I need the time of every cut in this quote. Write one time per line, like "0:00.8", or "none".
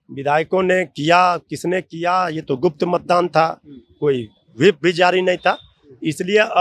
none